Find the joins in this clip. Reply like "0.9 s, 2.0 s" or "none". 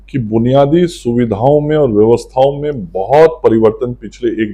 none